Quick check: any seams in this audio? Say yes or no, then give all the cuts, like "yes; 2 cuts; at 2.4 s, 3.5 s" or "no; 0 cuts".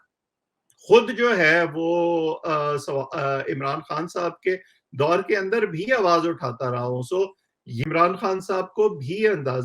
yes; 1 cut; at 7.8 s